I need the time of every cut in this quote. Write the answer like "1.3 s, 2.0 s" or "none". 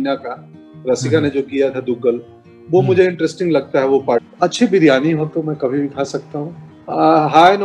4.3 s, 6.7 s

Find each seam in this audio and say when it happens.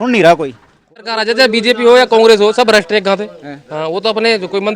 1.1 s

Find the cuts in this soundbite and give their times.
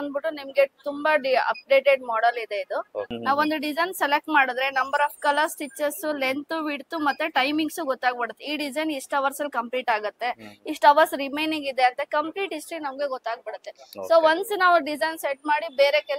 3.1 s

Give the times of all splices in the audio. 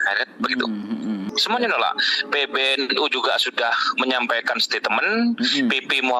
1.3 s

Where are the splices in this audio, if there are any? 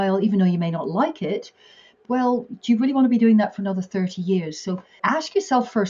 1.9 s, 4.9 s

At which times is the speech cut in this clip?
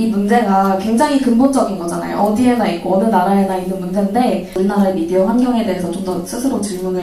4.5 s

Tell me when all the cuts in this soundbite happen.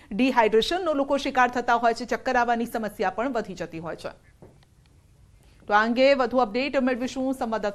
none

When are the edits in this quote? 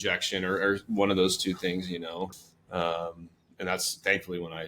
2.3 s

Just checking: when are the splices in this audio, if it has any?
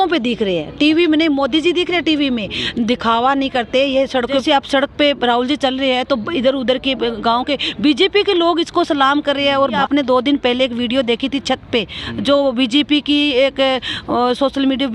4.4 s, 9.8 s

